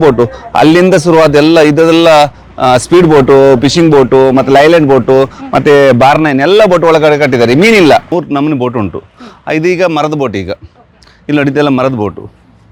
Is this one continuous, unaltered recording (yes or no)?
no